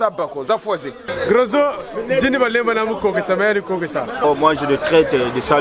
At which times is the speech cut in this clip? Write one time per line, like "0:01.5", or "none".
0:01.0
0:04.2